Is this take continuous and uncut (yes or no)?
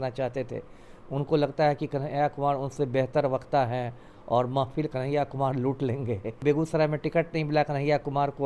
no